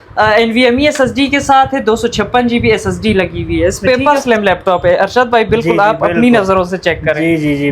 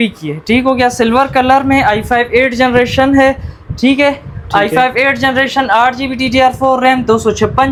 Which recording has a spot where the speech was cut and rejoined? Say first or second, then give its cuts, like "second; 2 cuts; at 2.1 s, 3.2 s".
first; 1 cut; at 3.8 s